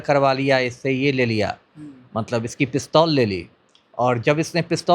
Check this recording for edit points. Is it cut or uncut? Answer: uncut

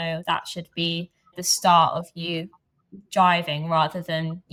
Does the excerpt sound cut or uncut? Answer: uncut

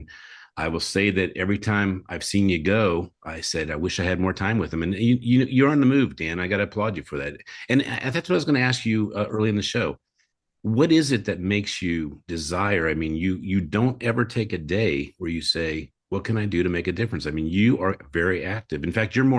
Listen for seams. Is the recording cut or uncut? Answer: uncut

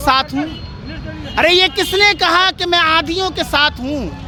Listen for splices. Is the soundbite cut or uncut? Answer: uncut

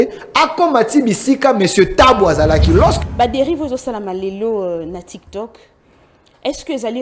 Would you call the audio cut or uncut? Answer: cut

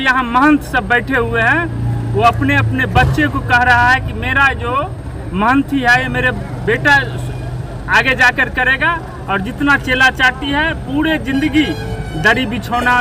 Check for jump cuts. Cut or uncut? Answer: uncut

